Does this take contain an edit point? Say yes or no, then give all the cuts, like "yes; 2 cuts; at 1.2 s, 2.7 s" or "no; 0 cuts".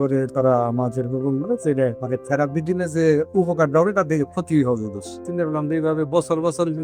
yes; 2 cuts; at 2.0 s, 5.2 s